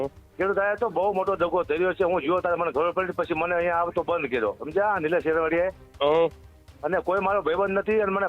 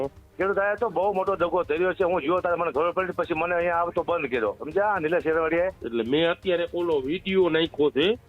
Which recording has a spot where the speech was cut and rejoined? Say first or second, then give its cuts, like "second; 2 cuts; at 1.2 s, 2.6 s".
second; 1 cut; at 5.8 s